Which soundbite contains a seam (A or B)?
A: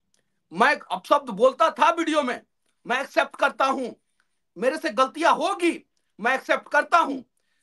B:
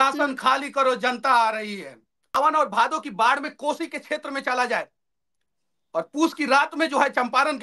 B